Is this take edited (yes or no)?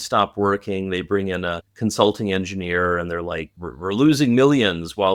no